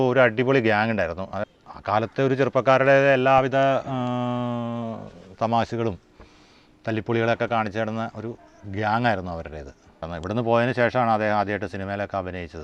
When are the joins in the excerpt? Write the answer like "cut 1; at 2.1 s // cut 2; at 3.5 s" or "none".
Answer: cut 1; at 1.4 s // cut 2; at 10.1 s